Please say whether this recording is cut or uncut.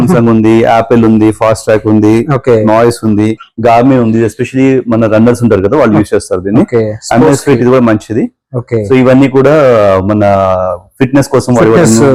uncut